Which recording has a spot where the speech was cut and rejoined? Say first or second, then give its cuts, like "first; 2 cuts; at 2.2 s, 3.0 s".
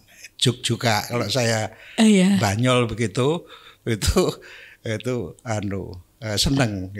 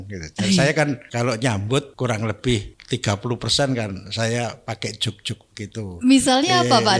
second; 3 cuts; at 1.1 s, 1.9 s, 2.7 s